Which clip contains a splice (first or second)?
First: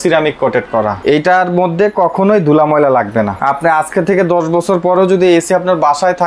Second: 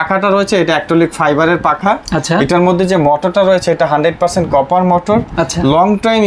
first